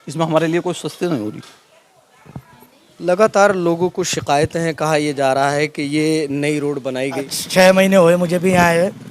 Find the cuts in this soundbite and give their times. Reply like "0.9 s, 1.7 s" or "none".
7.1 s